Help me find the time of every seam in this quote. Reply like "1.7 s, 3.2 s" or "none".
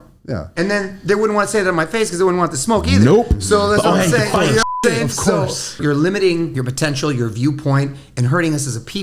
5.8 s, 6.5 s